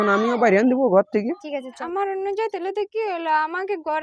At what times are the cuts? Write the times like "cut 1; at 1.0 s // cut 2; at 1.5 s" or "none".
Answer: cut 1; at 1.8 s